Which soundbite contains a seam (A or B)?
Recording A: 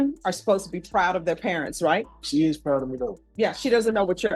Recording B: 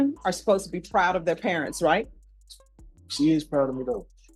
A